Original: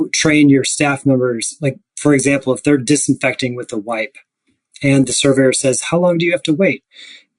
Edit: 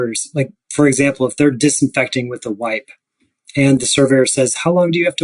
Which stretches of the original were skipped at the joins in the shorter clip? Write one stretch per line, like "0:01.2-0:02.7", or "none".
none